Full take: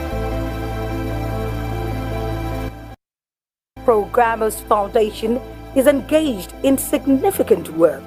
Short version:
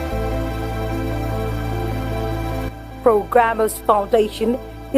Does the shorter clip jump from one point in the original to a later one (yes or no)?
yes